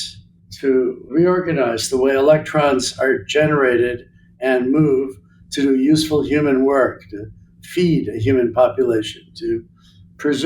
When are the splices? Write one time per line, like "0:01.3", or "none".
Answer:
0:01.1